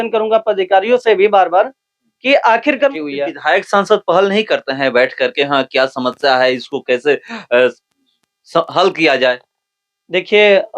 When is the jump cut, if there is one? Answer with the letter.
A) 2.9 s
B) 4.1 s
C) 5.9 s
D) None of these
A